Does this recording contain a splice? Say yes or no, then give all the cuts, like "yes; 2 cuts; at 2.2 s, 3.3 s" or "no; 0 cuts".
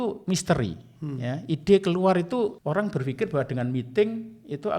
yes; 1 cut; at 2.6 s